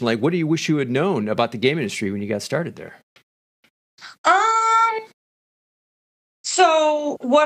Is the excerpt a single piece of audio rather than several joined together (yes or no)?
yes